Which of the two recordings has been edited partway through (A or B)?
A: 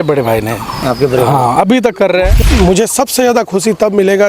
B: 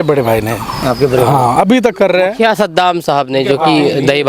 A